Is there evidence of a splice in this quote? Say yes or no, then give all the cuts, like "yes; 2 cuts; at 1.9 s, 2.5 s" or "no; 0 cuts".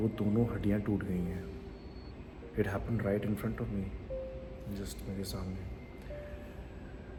no; 0 cuts